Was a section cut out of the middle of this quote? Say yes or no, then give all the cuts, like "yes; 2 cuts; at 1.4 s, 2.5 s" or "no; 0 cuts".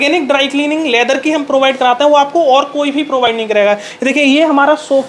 no; 0 cuts